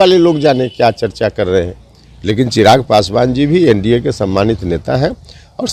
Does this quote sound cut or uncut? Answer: uncut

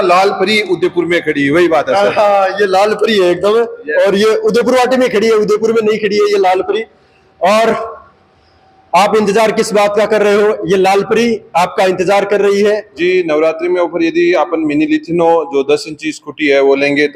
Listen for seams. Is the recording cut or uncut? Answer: cut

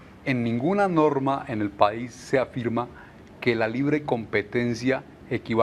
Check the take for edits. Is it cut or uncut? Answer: cut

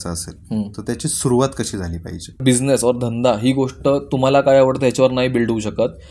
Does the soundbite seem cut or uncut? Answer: cut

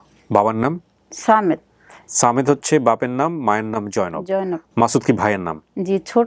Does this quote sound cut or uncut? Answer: cut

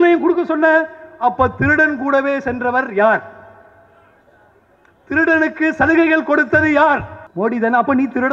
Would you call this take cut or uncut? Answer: cut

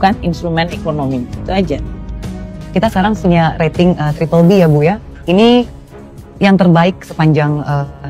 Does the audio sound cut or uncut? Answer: uncut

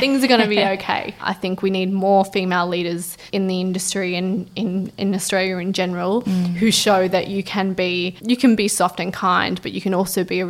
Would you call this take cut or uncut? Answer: cut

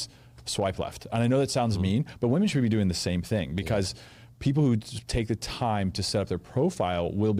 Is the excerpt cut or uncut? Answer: uncut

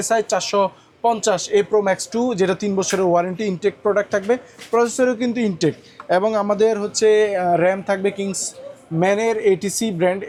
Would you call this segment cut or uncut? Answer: uncut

